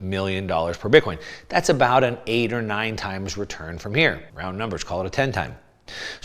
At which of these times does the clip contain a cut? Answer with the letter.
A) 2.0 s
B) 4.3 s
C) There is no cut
B